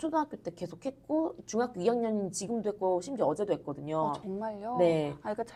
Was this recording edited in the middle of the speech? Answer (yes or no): no